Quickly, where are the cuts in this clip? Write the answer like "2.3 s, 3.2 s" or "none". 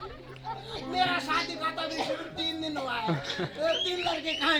none